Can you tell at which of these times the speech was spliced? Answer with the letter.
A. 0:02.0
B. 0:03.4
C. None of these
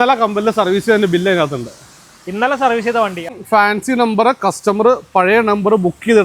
B